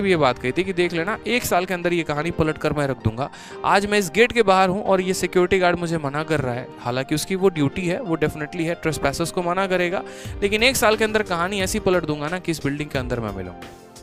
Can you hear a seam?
no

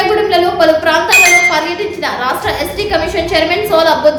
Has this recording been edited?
no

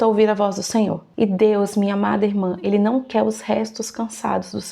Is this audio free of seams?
no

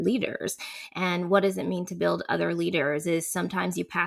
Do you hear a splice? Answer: no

